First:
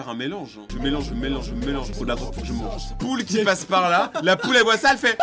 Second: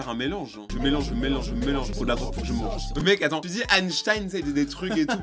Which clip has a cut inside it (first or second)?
first